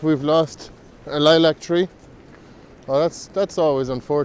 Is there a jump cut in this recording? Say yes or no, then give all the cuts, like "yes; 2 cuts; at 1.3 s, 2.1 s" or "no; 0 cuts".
no; 0 cuts